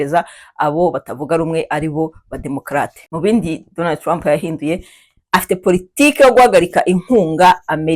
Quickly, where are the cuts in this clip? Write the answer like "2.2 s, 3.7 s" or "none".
3.0 s